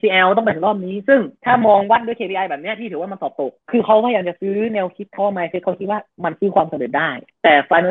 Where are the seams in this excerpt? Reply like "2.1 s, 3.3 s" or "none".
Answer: 1.3 s, 3.6 s

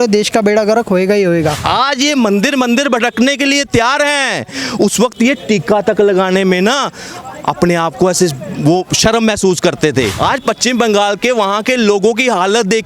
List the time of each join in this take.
1.6 s, 10.1 s

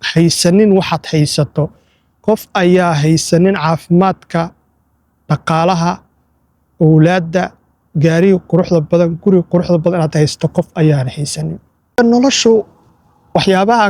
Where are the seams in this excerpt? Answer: 11.9 s

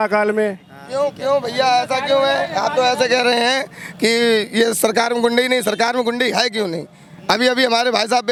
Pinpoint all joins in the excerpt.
none

